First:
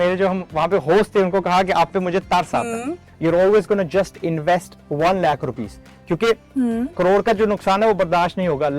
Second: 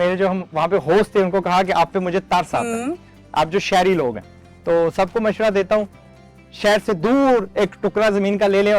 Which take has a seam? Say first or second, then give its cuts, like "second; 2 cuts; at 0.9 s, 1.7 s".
first; 1 cut; at 3.1 s